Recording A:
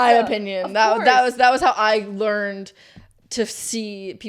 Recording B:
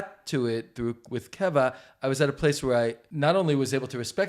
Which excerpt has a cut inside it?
B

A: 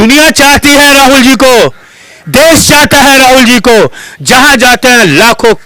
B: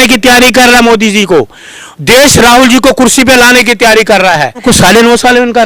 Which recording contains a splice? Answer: B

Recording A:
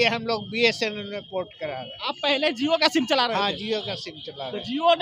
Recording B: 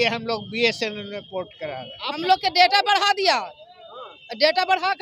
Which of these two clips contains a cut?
B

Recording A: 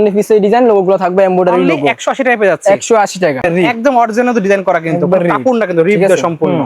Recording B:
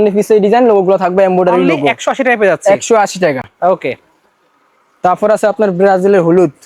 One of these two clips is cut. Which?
A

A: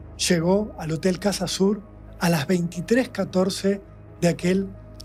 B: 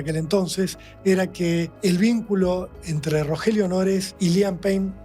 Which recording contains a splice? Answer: B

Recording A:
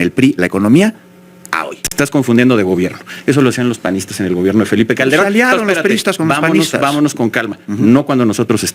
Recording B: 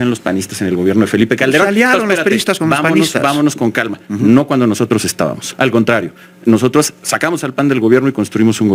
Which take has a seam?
A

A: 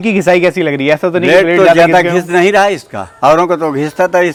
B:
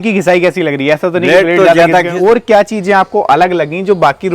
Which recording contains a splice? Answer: B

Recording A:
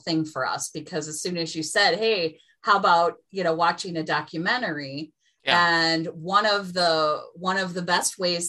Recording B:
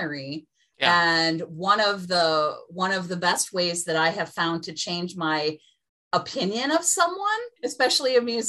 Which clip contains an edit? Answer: B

